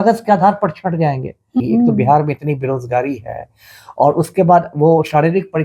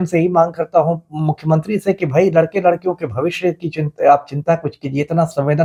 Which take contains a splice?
first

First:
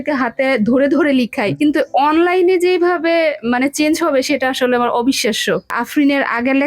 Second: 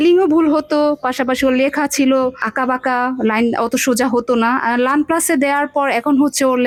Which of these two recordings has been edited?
first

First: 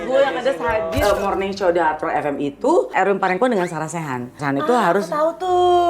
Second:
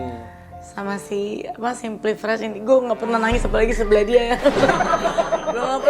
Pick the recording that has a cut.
first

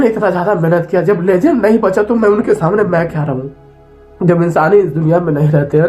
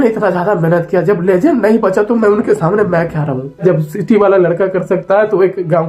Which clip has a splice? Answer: second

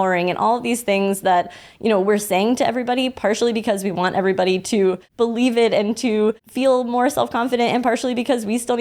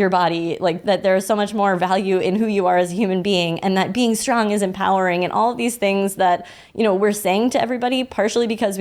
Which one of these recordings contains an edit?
first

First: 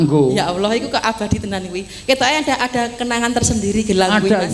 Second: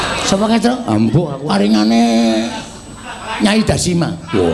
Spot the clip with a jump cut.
second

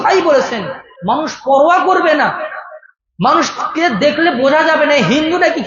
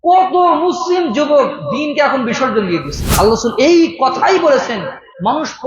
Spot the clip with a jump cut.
second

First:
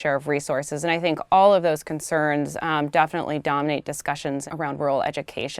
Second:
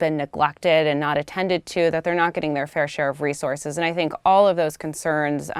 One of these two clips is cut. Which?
first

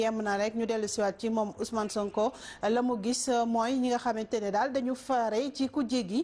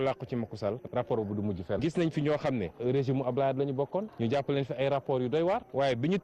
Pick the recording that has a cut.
second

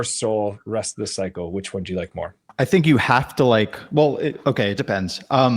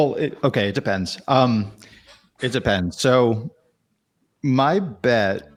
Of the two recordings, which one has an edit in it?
first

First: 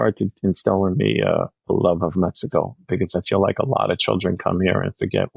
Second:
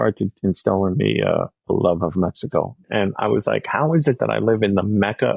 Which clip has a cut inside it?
second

